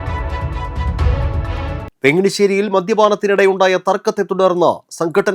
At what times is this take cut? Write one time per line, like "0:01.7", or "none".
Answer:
0:01.9